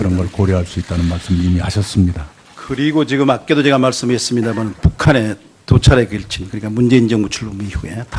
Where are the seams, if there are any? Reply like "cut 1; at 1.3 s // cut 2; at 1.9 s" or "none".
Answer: cut 1; at 7.1 s